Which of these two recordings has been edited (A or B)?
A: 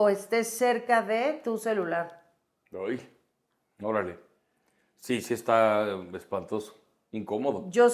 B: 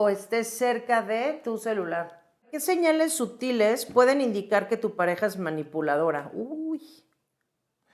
B